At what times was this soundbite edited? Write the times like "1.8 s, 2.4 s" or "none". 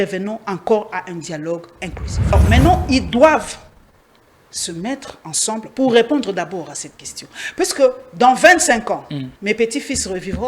2.3 s, 9.3 s